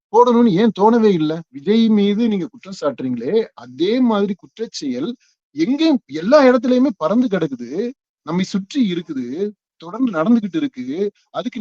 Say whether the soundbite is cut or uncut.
cut